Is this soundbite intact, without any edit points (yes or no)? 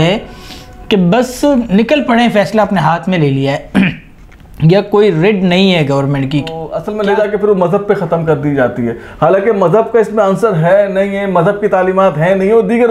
no